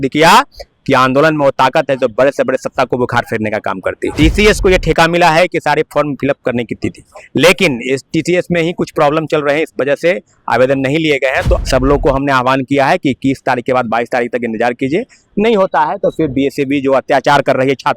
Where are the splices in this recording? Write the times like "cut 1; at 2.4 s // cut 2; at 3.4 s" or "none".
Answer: cut 1; at 4.1 s // cut 2; at 11.6 s